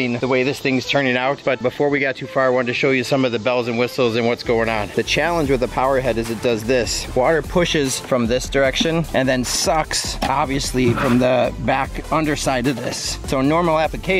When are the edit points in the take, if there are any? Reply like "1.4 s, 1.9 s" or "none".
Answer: 4.9 s